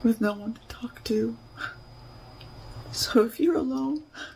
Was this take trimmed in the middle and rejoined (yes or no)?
no